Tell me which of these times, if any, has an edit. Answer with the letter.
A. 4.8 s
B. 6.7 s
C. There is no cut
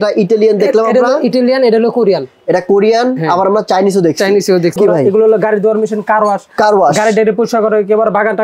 A